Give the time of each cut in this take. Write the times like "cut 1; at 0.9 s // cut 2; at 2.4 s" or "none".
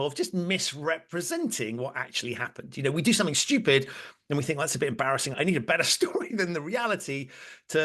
cut 1; at 5.4 s

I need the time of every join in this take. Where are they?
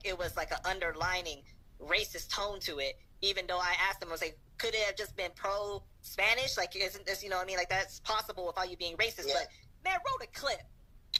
none

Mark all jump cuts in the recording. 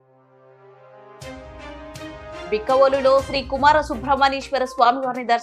cut 1; at 2.5 s

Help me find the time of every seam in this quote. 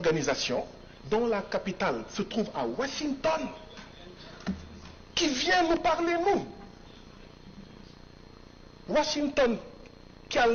none

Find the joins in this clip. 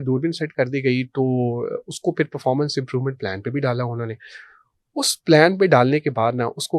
none

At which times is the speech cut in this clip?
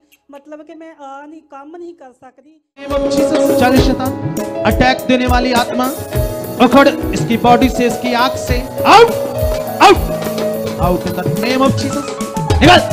cut 1; at 2.9 s

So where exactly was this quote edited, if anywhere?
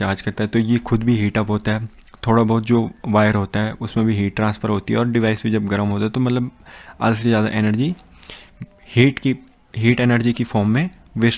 none

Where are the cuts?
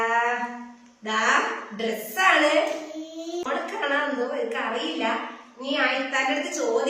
cut 1; at 3.4 s

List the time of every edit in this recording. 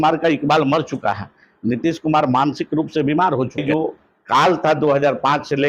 cut 1; at 3.6 s

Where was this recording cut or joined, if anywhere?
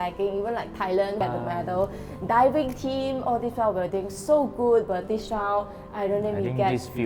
none

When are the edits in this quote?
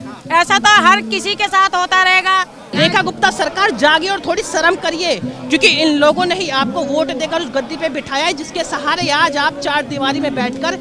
cut 1; at 2.7 s

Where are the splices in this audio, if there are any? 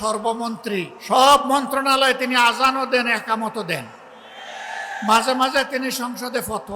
cut 1; at 1.0 s

